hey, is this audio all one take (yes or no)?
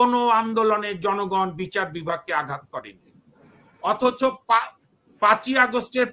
yes